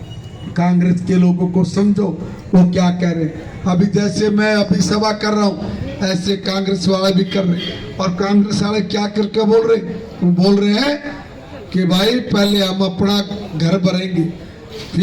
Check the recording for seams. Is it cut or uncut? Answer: uncut